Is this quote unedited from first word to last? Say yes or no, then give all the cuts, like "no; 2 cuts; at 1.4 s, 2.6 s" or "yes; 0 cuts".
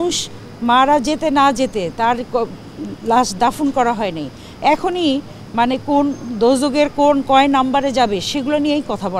yes; 0 cuts